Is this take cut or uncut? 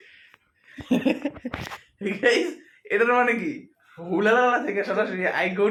uncut